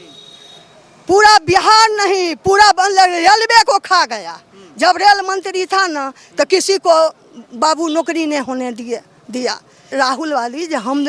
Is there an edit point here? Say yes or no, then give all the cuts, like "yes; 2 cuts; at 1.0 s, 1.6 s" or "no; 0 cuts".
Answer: yes; 1 cut; at 9.8 s